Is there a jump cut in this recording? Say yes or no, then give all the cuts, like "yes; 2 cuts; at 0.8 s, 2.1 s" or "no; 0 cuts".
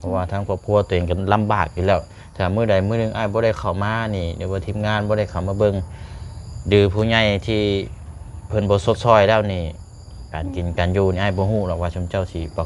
no; 0 cuts